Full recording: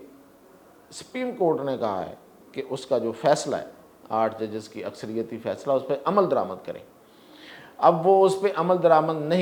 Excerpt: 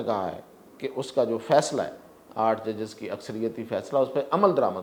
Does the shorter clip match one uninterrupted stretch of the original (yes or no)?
yes